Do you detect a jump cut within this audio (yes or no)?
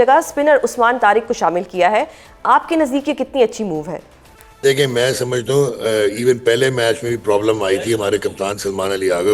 no